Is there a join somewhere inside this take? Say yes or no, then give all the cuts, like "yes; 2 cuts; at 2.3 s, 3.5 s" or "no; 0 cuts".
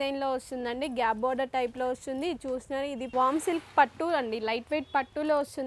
yes; 1 cut; at 3.0 s